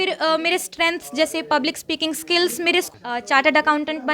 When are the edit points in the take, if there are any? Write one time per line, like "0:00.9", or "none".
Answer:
0:02.9